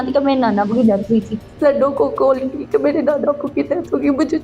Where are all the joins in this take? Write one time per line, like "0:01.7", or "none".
0:01.4